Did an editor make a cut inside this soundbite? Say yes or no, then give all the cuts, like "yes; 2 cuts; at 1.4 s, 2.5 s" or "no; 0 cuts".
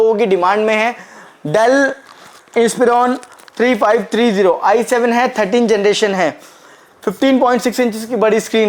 no; 0 cuts